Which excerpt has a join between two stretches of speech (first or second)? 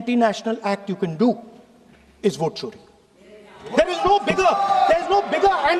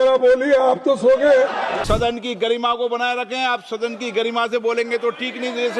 second